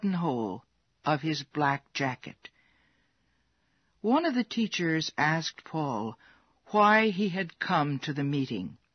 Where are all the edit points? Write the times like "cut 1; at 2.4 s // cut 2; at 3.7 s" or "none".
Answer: cut 1; at 3.0 s